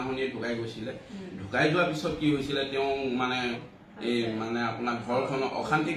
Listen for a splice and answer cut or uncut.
cut